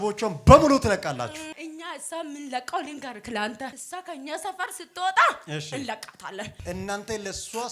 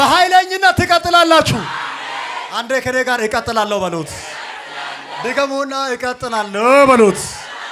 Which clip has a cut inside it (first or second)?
first